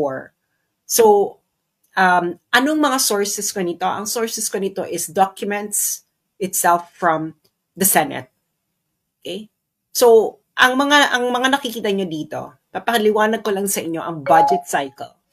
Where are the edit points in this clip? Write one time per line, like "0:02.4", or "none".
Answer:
none

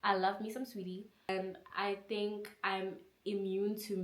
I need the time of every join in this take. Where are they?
0:01.3

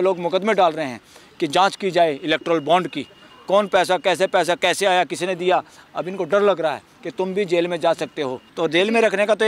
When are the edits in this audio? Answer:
0:05.8
0:08.4

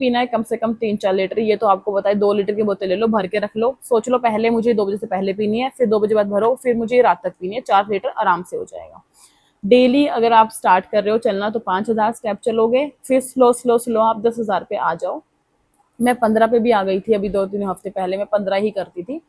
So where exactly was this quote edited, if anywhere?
none

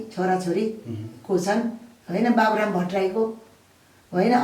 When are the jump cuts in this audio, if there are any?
none

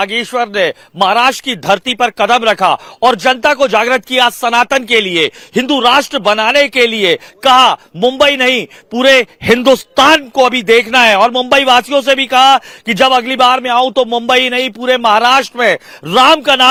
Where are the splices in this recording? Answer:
none

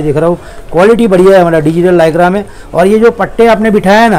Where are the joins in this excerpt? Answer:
none

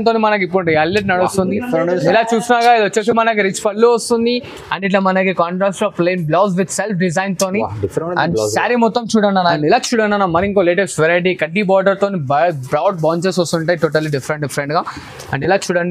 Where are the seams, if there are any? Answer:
0:09.6

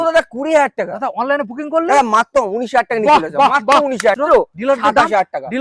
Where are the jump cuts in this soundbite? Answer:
0:04.2

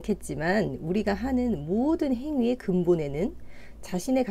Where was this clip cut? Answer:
none

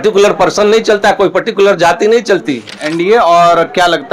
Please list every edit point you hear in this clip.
0:02.8

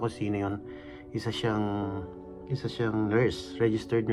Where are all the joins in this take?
none

